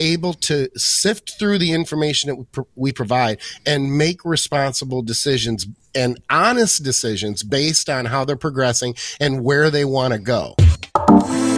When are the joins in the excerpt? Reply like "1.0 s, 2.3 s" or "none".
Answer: 10.5 s